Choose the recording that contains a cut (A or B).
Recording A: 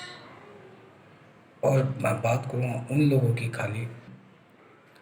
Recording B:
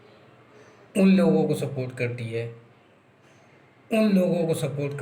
A